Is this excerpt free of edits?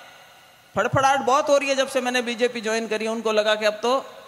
yes; 0 cuts

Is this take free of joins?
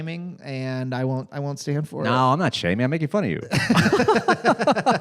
yes; 0 cuts

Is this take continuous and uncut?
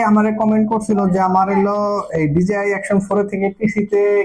yes; 0 cuts

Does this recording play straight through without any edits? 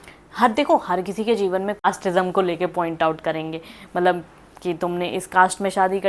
no; 1 cut; at 1.9 s

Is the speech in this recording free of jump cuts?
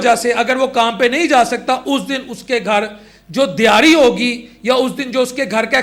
yes; 0 cuts

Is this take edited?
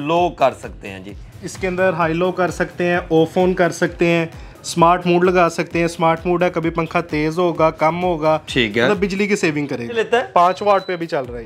yes; 1 cut; at 10.0 s

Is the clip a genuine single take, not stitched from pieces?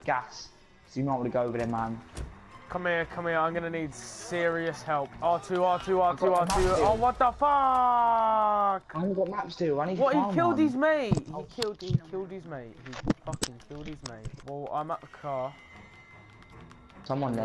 no; 2 cuts; at 6.7 s, 14.4 s

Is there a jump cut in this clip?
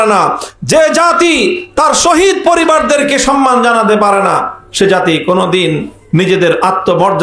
no; 0 cuts

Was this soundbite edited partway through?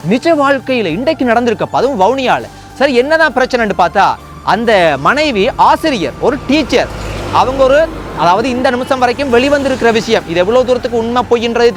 no; 0 cuts

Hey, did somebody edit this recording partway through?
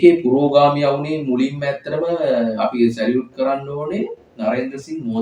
no; 0 cuts

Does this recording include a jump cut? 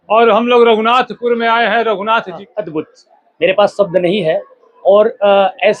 yes; 1 cut; at 2.4 s

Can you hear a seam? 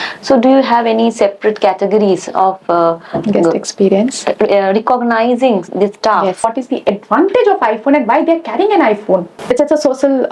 yes; 2 cuts; at 6.5 s, 9.3 s

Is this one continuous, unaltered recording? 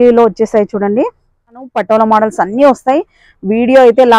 no; 1 cut; at 1.7 s

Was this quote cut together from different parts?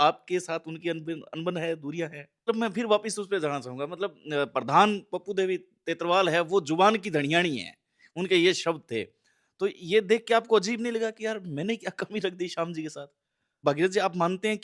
yes; 2 cuts; at 2.4 s, 13.5 s

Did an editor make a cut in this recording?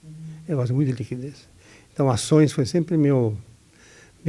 no; 0 cuts

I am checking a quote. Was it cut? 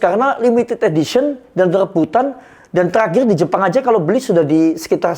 no; 0 cuts

